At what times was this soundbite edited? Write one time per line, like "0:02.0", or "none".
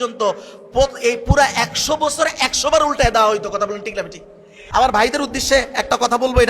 0:04.6